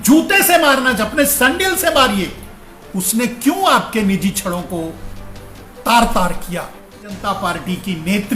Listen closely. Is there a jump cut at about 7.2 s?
yes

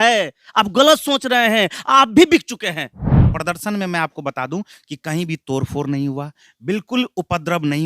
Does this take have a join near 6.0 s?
no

